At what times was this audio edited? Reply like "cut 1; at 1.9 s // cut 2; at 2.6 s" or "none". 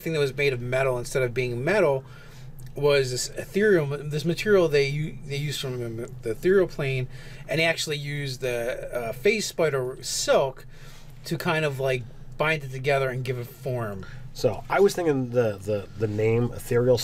none